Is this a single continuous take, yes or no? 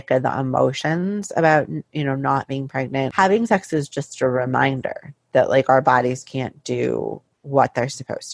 no